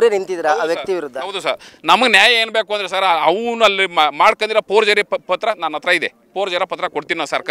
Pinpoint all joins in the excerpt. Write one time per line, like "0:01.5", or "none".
none